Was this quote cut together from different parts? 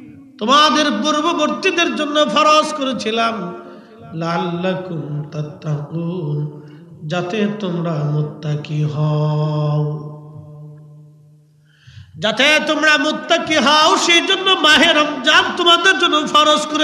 no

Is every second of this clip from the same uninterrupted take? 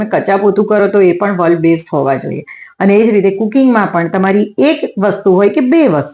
yes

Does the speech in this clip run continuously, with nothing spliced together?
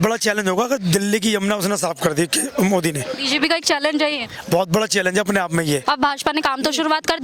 no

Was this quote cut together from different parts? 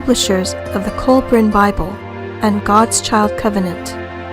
yes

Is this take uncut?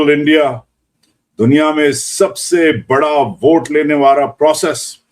no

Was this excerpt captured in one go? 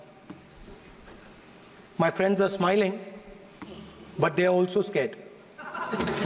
yes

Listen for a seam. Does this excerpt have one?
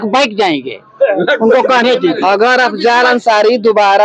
no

